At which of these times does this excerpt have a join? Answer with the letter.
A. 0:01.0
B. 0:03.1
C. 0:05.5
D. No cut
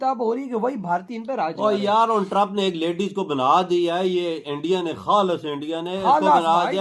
D